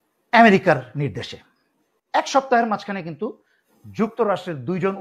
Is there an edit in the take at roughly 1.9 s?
yes; 1 cut; at 1.9 s

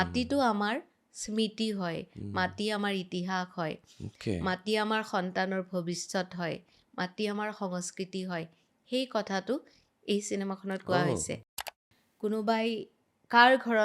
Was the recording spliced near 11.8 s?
yes; 1 cut; at 11.8 s

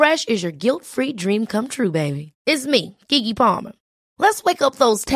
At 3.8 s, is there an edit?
no; 0 cuts

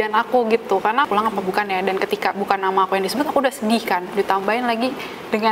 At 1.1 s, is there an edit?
yes; 1 cut; at 1.1 s

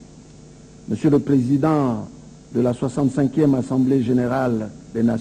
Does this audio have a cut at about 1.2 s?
yes; 1 cut; at 1.2 s

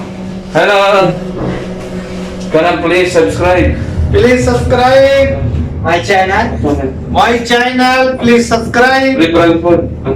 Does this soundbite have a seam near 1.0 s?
yes; 1 cut; at 1.0 s

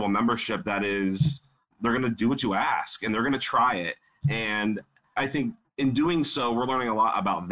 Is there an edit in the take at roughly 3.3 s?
no; 2 cuts; at 1.8 s, 5.3 s

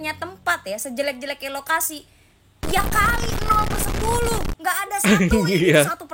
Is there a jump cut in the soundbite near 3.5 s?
no; 0 cuts

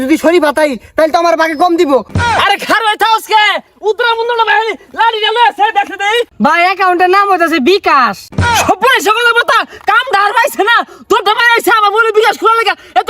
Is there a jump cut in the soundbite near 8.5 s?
yes; 3 cuts; at 2.1 s, 6.3 s, 8.5 s

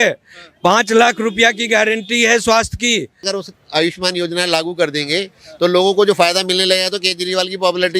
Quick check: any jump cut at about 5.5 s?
no; 1 cut; at 3.2 s

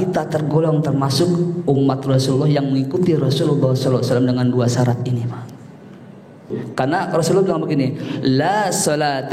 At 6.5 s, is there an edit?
yes; 1 cut; at 6.5 s

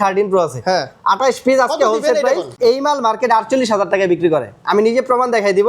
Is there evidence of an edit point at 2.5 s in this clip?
yes; 1 cut; at 2.5 s

